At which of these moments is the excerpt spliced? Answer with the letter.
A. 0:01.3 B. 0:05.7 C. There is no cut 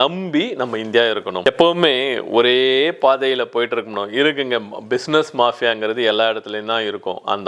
A